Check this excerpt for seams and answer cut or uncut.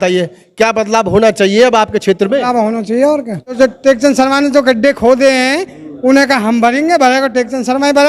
cut